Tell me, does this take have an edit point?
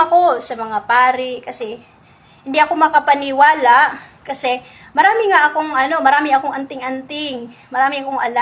no; 0 cuts

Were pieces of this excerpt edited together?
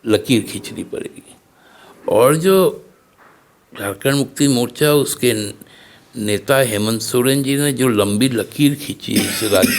no; 0 cuts

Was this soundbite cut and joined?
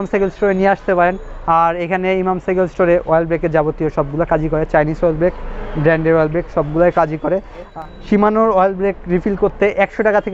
yes; 1 cut; at 7.7 s

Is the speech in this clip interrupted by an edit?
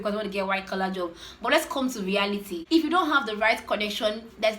yes; 1 cut; at 2.5 s

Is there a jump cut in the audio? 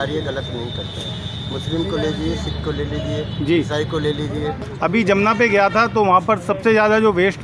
yes; 1 cut; at 4.6 s

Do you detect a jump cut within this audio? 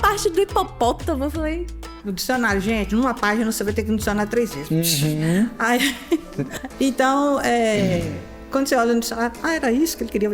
yes; 2 cuts; at 2.0 s, 6.4 s

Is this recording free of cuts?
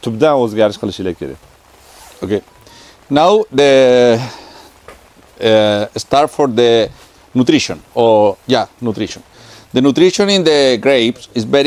yes; 0 cuts

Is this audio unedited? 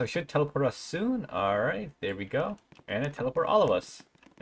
yes; 0 cuts

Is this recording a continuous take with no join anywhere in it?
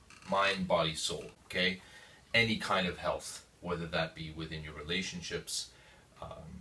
yes; 0 cuts

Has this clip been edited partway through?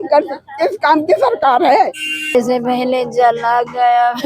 yes; 1 cut; at 2.3 s

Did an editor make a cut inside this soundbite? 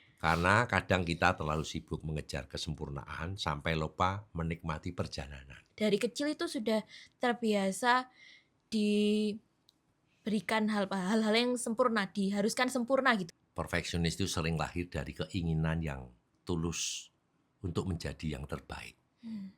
yes; 2 cuts; at 5.7 s, 13.3 s

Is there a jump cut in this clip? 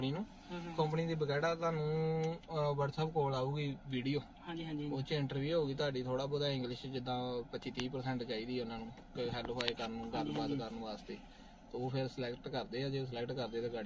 no; 0 cuts

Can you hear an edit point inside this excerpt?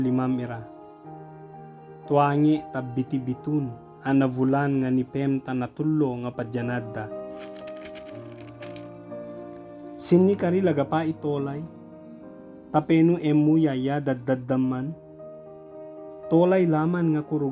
yes; 6 cuts; at 0.7 s, 2.1 s, 6.8 s, 10.1 s, 14.9 s, 16.3 s

